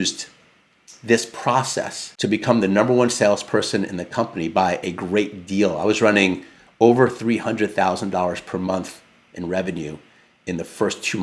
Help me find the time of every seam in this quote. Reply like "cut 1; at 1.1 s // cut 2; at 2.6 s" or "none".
cut 1; at 2.0 s